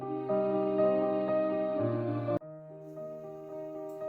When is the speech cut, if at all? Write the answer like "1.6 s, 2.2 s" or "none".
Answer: 2.4 s